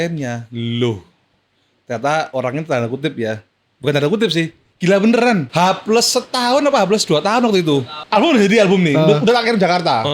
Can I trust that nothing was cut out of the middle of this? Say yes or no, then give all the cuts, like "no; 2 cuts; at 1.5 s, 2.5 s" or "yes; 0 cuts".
no; 1 cut; at 5.5 s